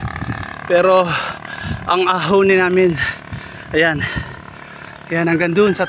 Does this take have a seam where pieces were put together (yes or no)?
no